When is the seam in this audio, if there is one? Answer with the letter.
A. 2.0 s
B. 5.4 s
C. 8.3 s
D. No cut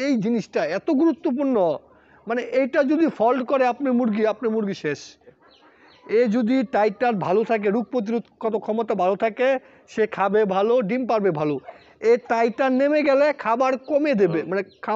B